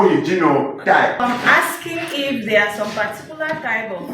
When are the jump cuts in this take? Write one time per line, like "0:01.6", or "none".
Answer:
0:01.2